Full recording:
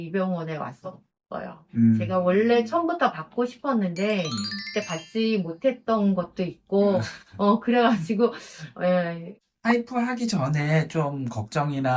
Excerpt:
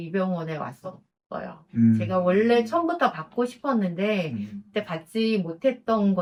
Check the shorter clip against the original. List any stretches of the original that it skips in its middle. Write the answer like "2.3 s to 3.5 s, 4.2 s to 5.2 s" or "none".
none